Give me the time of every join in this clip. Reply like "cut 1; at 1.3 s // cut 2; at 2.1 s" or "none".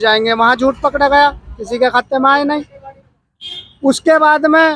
none